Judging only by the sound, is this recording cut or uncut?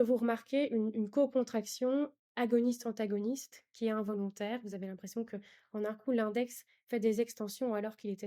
uncut